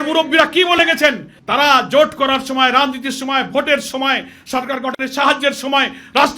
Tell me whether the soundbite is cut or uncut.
uncut